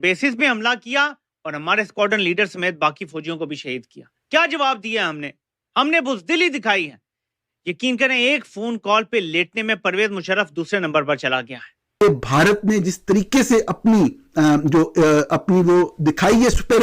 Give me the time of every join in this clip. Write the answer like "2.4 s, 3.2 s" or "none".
12.0 s